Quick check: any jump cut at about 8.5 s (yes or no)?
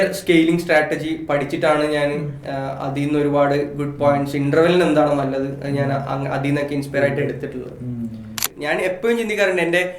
yes